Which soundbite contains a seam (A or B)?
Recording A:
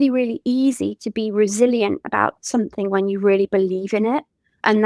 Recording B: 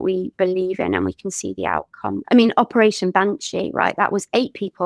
B